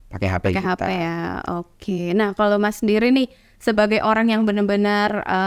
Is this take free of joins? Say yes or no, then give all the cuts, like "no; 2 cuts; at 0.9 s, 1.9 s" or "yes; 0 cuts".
yes; 0 cuts